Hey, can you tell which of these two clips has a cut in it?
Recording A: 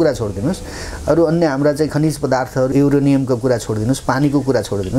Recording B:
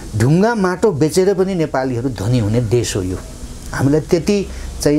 A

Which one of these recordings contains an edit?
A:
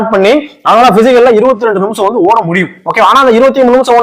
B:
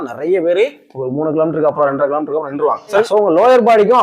B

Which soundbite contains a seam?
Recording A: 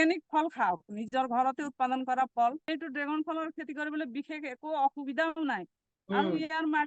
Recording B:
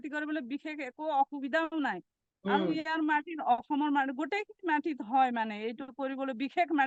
A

